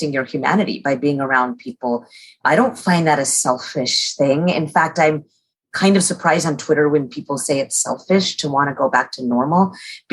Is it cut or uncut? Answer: uncut